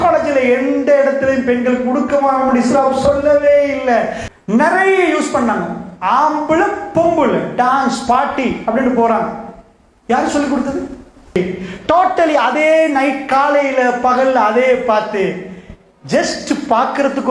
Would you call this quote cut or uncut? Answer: cut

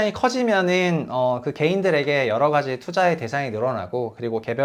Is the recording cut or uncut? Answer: uncut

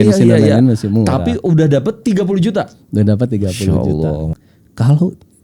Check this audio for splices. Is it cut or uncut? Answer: cut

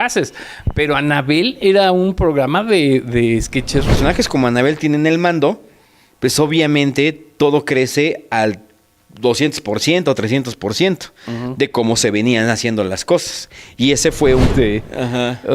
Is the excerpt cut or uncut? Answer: cut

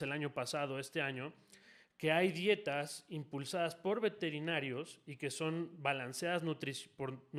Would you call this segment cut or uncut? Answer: uncut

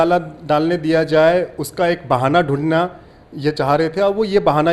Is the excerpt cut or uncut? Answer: uncut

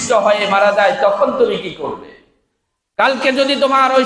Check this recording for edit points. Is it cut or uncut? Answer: uncut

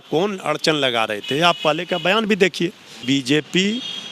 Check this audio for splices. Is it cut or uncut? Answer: cut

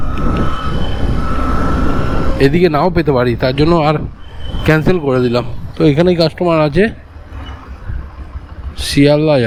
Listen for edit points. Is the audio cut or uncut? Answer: uncut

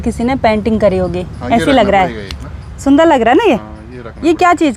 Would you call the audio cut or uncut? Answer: uncut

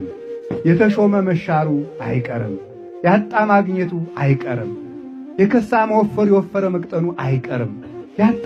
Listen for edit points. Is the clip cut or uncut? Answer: uncut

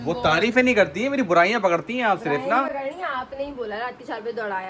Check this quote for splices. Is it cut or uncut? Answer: uncut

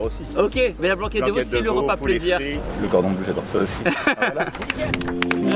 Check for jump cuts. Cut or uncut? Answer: uncut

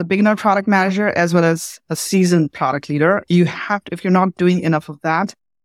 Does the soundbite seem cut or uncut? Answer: uncut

